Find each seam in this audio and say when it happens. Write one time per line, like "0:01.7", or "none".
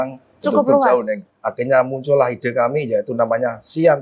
0:01.3